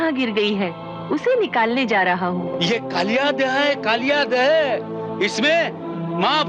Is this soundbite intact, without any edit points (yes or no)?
yes